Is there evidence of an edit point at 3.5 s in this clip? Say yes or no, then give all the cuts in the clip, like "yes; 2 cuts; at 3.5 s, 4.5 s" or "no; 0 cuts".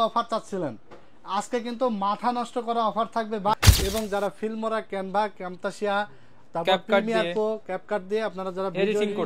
yes; 1 cut; at 3.5 s